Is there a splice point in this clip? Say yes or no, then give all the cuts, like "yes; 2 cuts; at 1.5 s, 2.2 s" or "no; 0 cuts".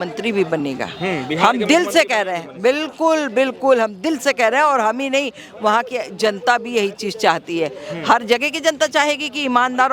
no; 0 cuts